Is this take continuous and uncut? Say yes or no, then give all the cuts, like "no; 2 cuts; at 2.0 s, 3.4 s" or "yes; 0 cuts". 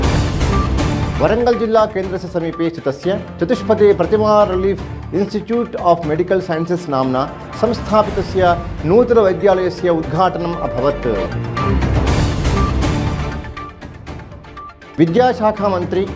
no; 1 cut; at 1.1 s